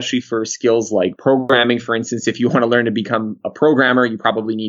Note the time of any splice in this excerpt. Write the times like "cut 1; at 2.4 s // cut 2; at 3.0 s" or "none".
none